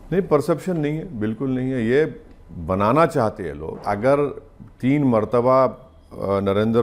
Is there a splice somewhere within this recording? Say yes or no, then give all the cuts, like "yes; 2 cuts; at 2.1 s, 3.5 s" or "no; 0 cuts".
yes; 1 cut; at 3.8 s